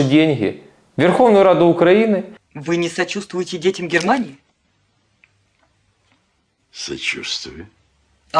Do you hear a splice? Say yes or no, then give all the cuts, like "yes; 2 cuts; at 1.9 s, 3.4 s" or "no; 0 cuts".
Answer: yes; 1 cut; at 2.3 s